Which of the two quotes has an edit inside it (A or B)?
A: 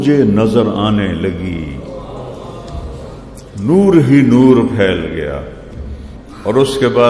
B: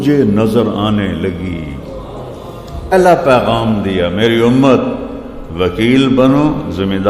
B